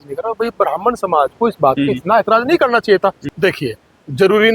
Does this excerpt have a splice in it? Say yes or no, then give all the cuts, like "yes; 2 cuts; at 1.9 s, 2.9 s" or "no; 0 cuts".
yes; 1 cut; at 3.2 s